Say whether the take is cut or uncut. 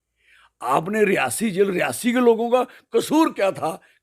uncut